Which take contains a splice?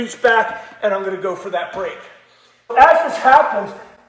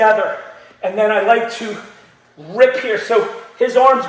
first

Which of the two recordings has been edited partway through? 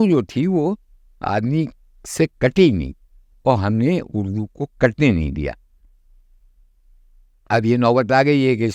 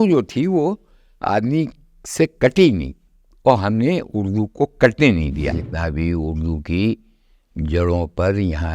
second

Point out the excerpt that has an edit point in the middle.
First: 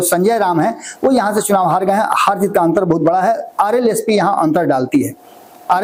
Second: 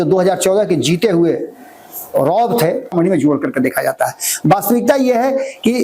second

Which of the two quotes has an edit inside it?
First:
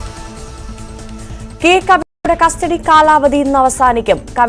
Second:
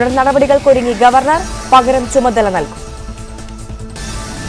first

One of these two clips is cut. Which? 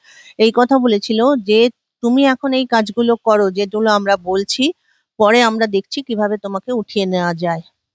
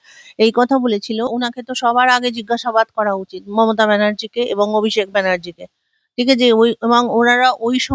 second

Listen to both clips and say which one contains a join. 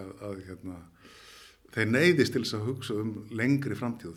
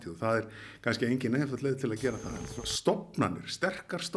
second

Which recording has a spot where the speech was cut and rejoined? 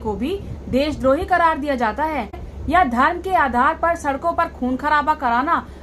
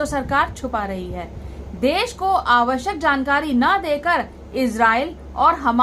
first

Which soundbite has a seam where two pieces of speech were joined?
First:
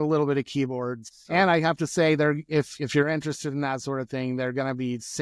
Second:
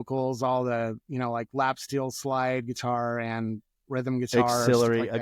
first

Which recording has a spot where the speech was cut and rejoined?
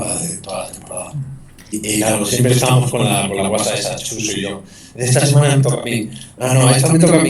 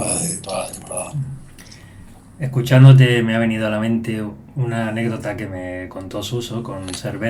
first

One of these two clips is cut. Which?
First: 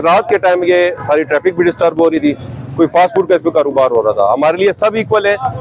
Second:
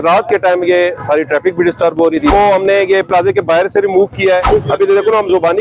second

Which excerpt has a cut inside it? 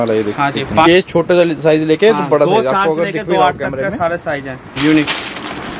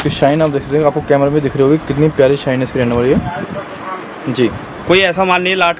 first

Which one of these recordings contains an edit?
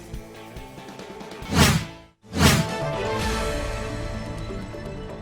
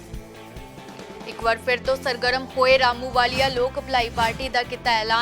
second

